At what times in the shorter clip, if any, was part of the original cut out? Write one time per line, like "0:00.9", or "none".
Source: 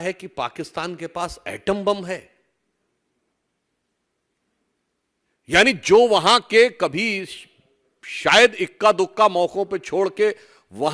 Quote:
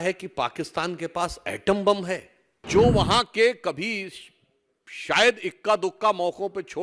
0:02.6